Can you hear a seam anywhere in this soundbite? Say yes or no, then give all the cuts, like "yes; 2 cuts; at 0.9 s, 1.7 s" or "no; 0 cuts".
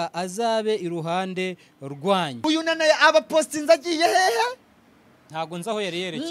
yes; 1 cut; at 2.3 s